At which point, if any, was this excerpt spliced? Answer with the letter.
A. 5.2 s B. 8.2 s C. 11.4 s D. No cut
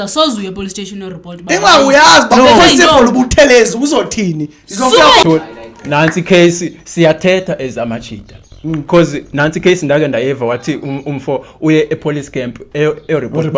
A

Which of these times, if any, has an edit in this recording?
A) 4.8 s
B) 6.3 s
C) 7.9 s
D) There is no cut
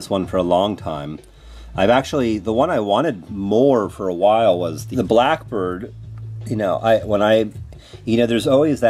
D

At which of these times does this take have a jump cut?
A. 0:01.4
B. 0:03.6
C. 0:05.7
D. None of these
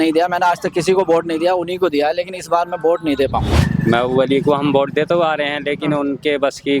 B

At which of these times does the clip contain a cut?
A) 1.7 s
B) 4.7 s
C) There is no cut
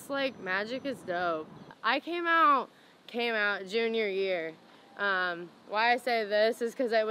A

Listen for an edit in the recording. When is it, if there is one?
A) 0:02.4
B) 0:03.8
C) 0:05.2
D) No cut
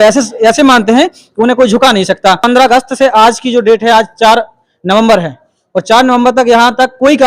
A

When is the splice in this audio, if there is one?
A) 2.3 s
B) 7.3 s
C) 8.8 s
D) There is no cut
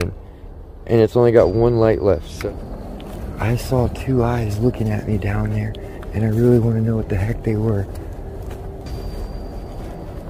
A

